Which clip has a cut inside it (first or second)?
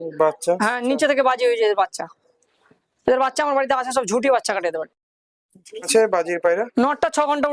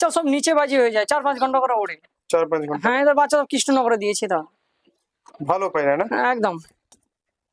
first